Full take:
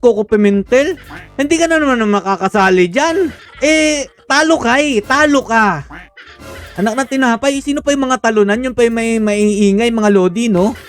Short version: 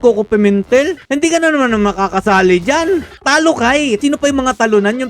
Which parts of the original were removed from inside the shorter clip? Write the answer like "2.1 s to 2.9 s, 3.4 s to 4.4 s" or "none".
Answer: 1.0 s to 1.3 s, 3.4 s to 4.2 s, 5.0 s to 7.6 s